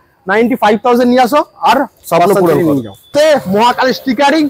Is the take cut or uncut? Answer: cut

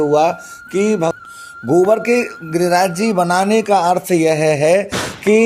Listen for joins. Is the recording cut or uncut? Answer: cut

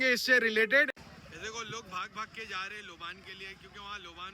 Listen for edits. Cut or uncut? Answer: cut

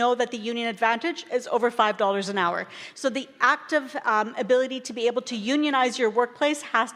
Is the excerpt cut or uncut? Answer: uncut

